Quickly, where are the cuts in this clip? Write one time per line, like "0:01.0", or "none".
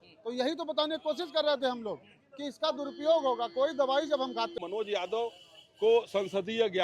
0:04.5

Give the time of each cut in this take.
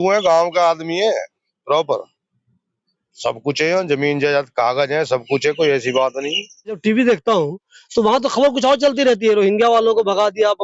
0:06.8

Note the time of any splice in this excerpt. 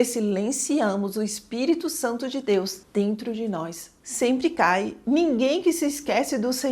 0:04.0

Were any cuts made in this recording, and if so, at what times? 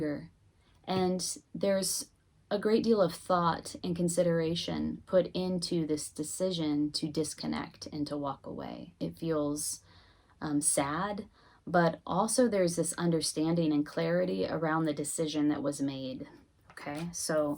0:09.0

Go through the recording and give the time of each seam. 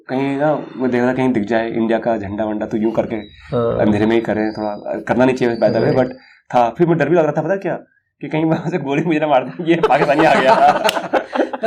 none

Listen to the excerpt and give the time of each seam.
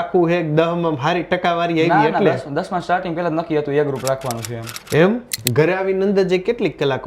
0:05.3

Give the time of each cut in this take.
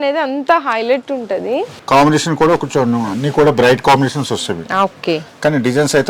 0:01.7

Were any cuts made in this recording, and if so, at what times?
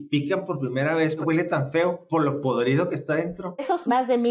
0:01.2
0:03.6

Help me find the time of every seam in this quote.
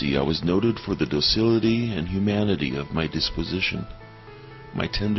none

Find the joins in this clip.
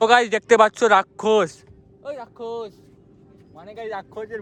none

